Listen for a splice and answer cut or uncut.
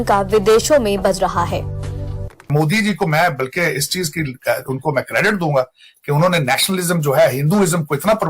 cut